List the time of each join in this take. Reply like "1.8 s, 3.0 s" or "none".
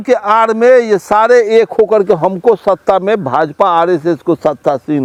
none